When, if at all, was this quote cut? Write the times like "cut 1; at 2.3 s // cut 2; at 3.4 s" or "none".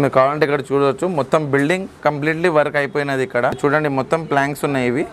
cut 1; at 3.6 s